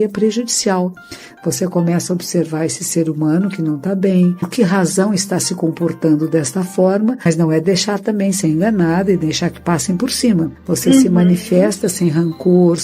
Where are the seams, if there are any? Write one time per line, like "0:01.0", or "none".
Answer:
0:04.5
0:07.3
0:10.6